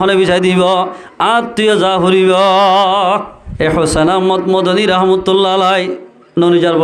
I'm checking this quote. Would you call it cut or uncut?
cut